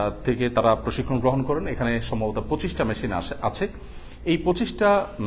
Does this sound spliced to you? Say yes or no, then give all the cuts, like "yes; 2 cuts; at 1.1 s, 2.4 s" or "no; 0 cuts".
no; 0 cuts